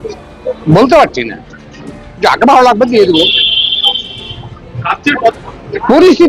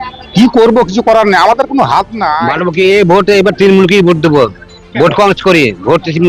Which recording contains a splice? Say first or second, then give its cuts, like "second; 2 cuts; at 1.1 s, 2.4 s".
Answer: second; 1 cut; at 2.4 s